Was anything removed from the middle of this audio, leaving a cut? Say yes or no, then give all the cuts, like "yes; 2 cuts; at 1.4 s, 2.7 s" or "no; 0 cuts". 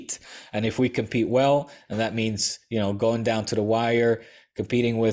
no; 0 cuts